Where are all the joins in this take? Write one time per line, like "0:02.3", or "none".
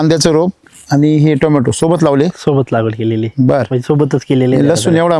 none